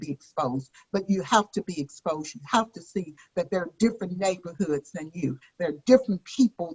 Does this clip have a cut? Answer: no; 0 cuts

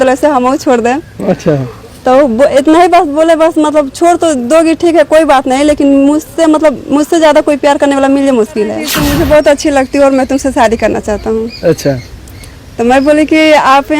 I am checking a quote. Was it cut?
yes; 1 cut; at 8.9 s

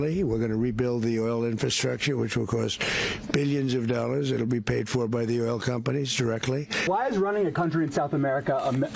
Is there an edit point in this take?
yes; 1 cut; at 6.8 s

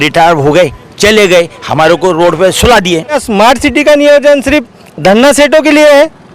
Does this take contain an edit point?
yes; 1 cut; at 3.2 s

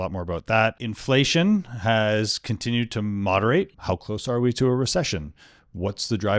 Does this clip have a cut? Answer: yes; 1 cut; at 3.8 s

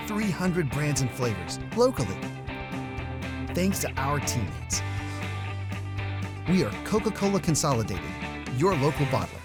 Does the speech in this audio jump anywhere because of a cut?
no; 0 cuts

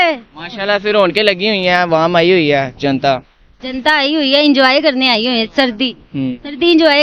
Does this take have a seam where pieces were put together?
no; 0 cuts

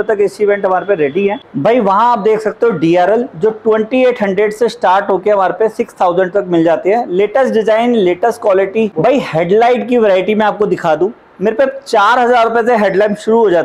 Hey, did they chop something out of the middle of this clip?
no; 0 cuts

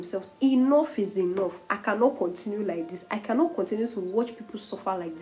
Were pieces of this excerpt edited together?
no; 0 cuts

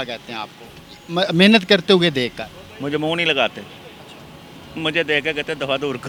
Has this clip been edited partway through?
no; 0 cuts

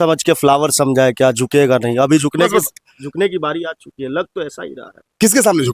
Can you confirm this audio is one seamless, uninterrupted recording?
yes; 0 cuts

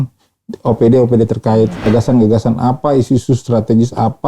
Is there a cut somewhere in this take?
yes; 1 cut; at 1.9 s

